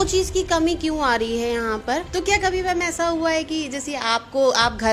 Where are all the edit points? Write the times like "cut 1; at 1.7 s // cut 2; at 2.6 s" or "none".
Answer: cut 1; at 2.1 s